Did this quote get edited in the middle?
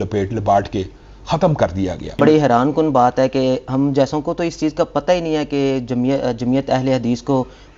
yes; 1 cut; at 2.2 s

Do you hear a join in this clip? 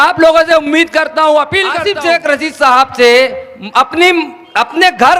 yes; 1 cut; at 1.8 s

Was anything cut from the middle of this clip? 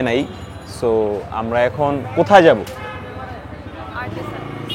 no; 0 cuts

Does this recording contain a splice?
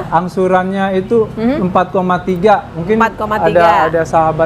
no; 0 cuts

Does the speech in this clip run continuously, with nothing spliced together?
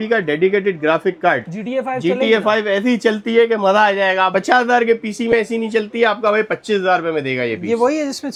yes; 0 cuts

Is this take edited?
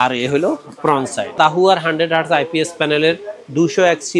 yes; 1 cut; at 1.3 s

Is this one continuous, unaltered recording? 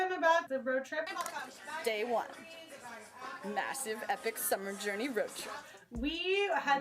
no; 2 cuts; at 1.1 s, 5.7 s

